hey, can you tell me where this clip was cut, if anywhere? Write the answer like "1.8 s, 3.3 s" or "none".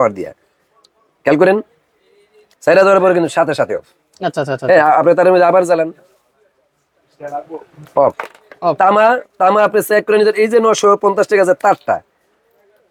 none

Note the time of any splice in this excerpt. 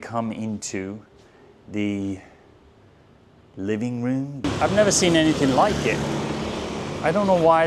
4.5 s

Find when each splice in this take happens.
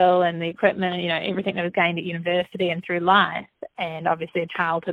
none

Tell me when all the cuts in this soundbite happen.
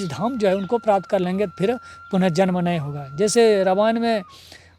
none

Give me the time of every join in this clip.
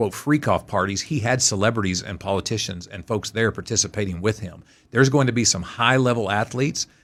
none

